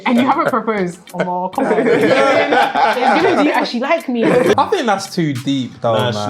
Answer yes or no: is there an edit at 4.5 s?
yes